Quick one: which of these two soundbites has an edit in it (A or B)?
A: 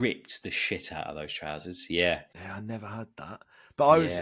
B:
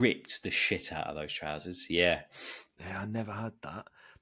A